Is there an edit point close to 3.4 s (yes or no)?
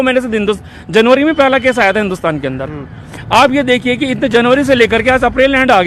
no